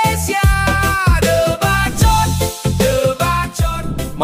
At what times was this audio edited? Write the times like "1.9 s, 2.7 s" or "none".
none